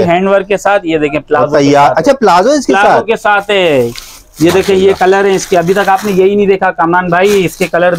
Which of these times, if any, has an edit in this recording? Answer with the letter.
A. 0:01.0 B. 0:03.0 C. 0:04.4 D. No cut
D